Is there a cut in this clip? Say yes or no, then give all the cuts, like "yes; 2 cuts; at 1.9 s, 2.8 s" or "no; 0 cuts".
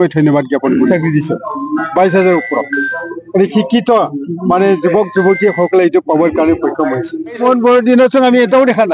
yes; 2 cuts; at 0.9 s, 7.4 s